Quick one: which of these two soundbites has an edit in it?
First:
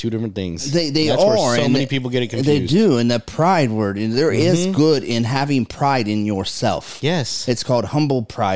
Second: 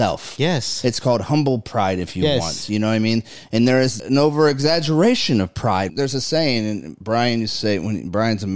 second; 2 cuts; at 4.0 s, 5.9 s

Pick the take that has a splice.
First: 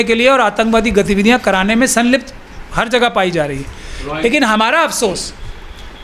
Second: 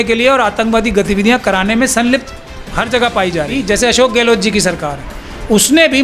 second; 1 cut; at 3.6 s

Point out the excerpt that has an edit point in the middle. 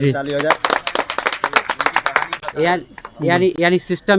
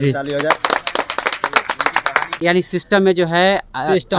second; 1 cut; at 2.4 s

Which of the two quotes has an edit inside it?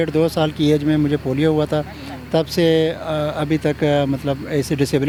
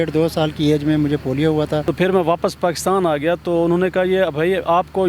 second; 1 cut; at 1.9 s

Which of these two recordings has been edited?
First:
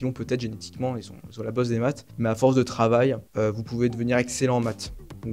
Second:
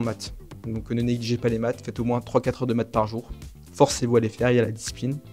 first; 2 cuts; at 2.1 s, 3.3 s

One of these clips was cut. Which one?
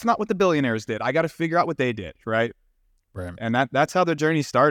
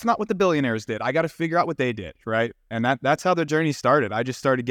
second; 1 cut; at 2.6 s

